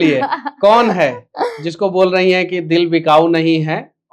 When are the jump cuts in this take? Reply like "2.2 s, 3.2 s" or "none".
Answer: none